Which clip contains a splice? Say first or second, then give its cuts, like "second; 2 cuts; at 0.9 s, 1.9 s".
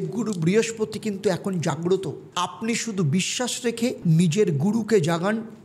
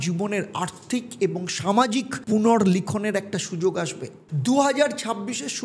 second; 2 cuts; at 2.2 s, 4.2 s